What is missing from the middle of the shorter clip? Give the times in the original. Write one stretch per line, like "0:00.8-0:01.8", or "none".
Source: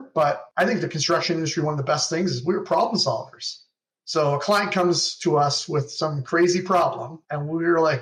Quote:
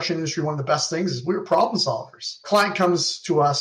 0:03.7-0:04.4